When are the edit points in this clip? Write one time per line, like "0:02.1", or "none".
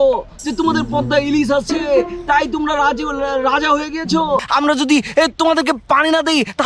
0:04.5